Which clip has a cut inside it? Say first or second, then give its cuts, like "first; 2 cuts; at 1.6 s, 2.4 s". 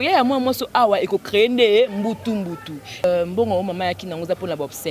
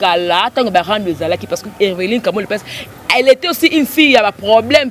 first; 1 cut; at 3.0 s